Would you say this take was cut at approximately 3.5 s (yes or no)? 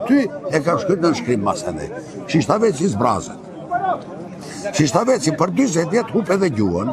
no